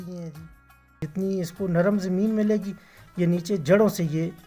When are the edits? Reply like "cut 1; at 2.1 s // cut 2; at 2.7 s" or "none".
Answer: cut 1; at 1.0 s